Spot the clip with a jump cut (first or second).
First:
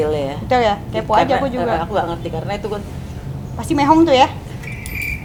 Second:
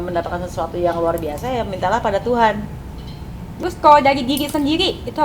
second